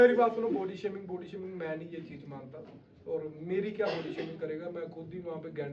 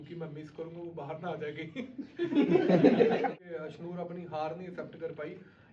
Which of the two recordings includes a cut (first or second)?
second